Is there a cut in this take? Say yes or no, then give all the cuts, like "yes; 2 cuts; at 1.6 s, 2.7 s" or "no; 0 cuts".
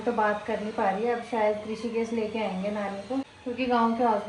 yes; 1 cut; at 3.3 s